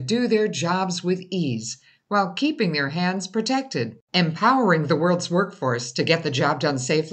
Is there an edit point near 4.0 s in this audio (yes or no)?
no